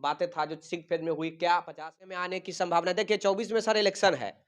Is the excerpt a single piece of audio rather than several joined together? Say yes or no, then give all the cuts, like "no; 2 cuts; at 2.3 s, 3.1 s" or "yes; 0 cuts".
no; 1 cut; at 2.2 s